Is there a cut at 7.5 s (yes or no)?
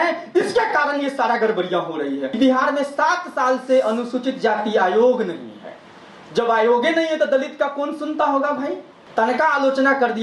no